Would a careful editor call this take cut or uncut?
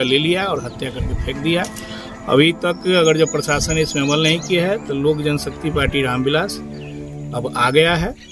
uncut